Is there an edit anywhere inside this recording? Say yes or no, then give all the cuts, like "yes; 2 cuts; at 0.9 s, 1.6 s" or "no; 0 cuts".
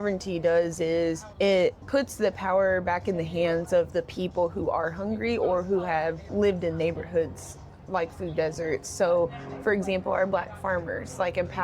yes; 3 cuts; at 1.3 s, 1.8 s, 6.3 s